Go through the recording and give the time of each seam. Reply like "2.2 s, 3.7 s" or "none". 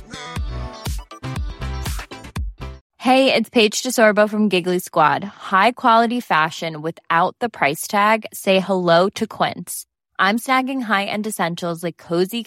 2.8 s